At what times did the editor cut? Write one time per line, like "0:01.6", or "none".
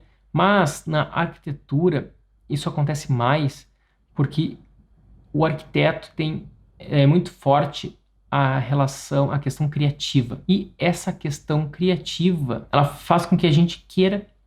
0:10.3
0:12.6